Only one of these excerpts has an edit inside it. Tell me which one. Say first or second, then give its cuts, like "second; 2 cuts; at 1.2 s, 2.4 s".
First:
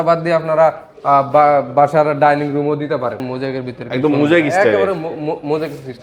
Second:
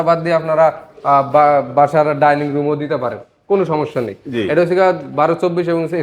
first; 1 cut; at 3.3 s